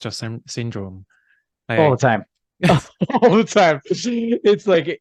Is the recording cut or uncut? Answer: uncut